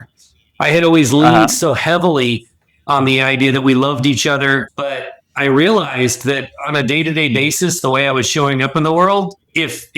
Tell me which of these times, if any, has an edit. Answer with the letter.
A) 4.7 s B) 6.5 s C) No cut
A